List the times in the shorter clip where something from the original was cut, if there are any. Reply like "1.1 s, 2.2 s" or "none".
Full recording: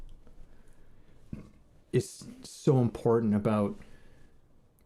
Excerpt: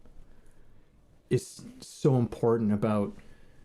1.0 s